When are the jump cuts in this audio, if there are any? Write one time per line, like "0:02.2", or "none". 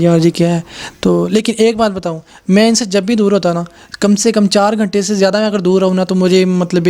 none